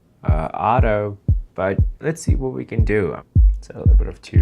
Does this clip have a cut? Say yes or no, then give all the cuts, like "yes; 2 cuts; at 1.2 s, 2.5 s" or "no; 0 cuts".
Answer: yes; 1 cut; at 3.2 s